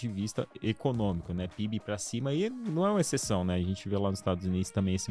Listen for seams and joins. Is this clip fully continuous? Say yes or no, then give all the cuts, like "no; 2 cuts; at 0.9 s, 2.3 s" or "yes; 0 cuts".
yes; 0 cuts